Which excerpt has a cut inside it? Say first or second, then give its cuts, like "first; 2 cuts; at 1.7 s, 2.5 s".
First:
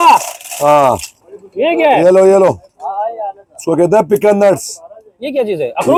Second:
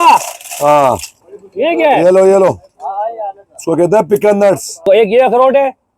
second; 1 cut; at 4.9 s